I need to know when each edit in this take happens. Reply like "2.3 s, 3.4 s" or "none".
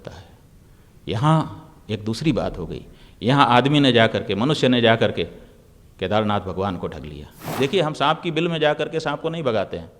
7.5 s